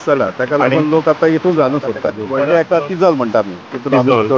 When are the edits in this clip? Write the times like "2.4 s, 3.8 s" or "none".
2.2 s